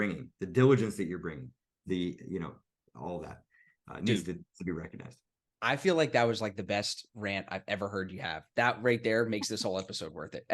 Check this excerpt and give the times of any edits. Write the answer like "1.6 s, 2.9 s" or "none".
none